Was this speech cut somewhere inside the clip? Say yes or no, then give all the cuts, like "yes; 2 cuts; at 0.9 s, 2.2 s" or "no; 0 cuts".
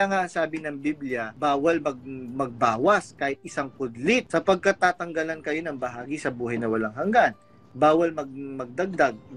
yes; 1 cut; at 7.3 s